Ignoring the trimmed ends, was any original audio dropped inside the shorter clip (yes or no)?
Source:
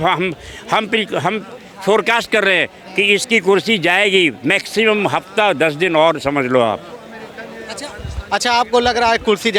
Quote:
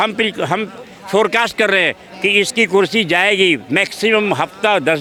no